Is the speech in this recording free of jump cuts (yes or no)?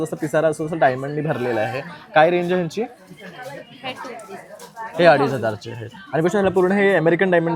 yes